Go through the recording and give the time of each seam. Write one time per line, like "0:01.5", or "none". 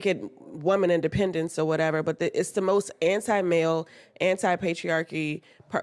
none